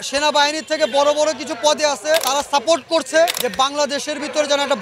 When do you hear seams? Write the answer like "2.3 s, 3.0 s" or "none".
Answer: 2.3 s, 3.4 s